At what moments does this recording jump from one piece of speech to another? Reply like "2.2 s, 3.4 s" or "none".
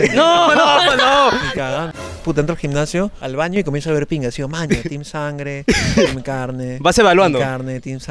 1.9 s